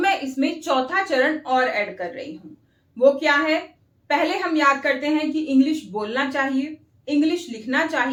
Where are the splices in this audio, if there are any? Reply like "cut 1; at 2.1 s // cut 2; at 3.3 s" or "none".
none